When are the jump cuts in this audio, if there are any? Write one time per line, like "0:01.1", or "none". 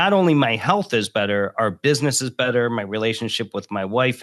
none

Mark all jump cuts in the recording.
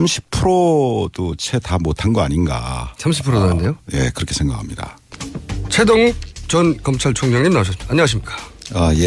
0:05.0

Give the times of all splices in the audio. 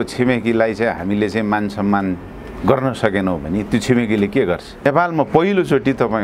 0:04.9

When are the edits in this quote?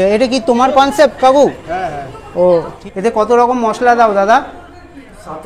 0:02.7

